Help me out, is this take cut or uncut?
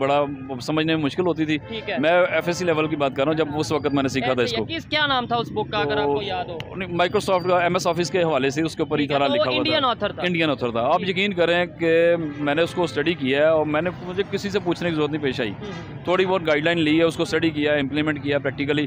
uncut